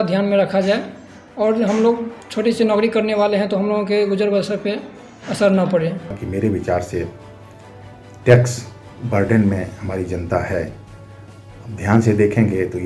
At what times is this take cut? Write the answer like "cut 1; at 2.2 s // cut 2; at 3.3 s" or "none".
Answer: cut 1; at 6.2 s